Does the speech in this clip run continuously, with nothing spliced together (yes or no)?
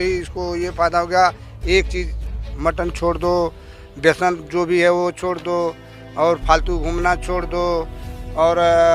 yes